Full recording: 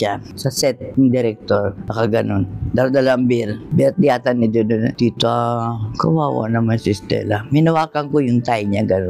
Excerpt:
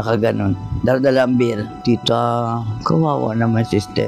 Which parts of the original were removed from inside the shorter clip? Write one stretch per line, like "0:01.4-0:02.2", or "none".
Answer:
0:03.7-0:04.9